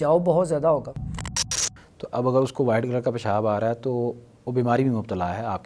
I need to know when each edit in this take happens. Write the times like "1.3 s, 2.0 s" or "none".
1.5 s